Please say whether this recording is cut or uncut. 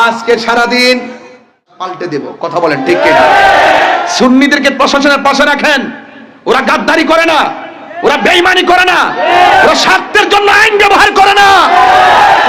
cut